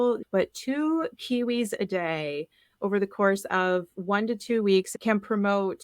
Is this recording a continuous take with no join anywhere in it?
no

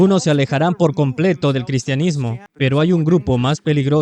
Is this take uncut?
no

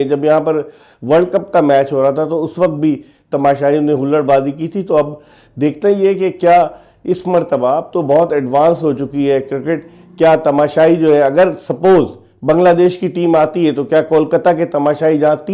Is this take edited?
no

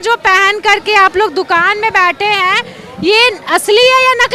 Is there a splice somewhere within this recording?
no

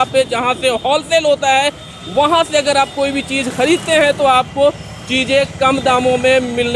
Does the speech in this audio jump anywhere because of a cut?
no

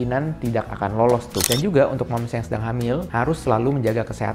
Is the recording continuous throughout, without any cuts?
no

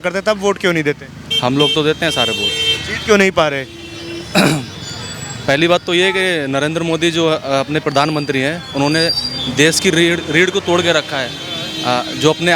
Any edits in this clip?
no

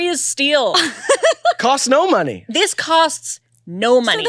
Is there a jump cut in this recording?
no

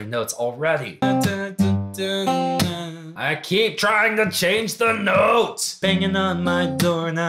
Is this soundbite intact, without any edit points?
no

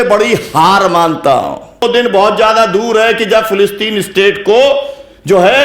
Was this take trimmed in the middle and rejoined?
yes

